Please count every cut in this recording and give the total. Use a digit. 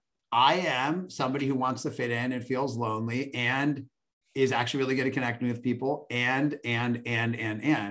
0